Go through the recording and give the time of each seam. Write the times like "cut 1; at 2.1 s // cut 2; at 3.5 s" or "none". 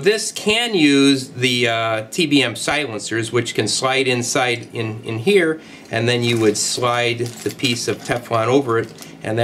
cut 1; at 1.8 s